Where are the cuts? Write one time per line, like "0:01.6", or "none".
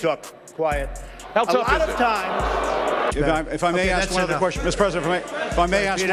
0:03.1